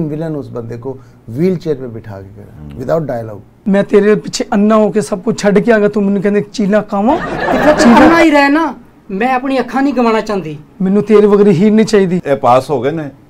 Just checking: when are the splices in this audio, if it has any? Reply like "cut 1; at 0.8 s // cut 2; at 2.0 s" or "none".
cut 1; at 3.6 s // cut 2; at 12.2 s